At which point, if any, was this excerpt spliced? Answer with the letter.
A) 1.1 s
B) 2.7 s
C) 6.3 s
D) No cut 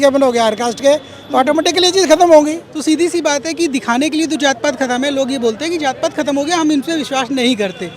B